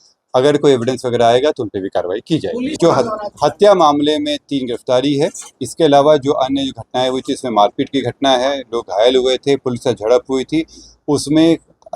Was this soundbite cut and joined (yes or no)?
yes